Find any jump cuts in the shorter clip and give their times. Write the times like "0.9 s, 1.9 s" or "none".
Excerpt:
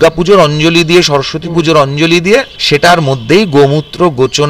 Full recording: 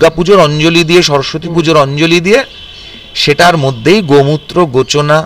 2.6 s